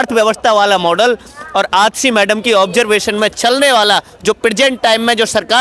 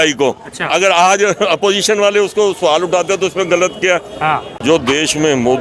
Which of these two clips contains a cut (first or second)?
second